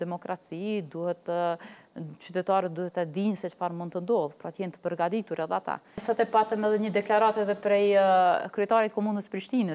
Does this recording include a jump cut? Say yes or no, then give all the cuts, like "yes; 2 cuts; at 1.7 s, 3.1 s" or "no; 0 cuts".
yes; 1 cut; at 6.0 s